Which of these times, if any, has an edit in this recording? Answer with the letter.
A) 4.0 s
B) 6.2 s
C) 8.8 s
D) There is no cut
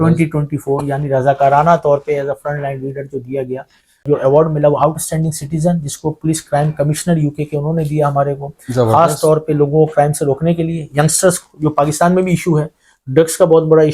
A